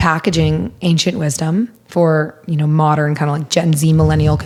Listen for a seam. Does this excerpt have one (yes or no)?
no